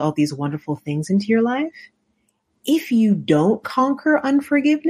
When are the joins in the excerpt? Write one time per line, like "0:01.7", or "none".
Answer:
none